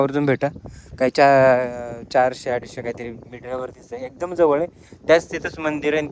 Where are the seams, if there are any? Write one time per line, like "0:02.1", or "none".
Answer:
none